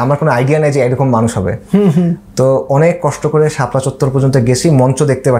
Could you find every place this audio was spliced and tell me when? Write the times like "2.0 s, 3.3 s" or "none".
none